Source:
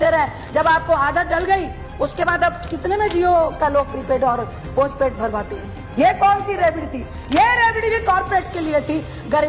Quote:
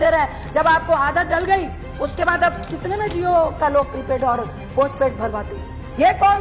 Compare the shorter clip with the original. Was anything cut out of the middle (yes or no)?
no